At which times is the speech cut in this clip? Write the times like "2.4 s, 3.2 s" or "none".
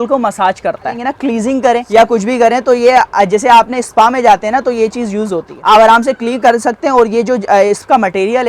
1.0 s, 1.9 s, 5.5 s